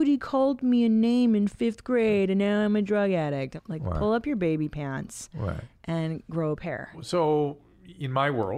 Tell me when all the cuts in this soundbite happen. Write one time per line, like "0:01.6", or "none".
0:03.6
0:07.0